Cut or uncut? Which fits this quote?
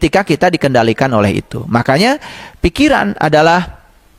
uncut